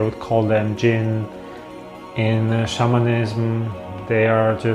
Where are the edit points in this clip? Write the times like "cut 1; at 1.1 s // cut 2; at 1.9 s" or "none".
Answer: none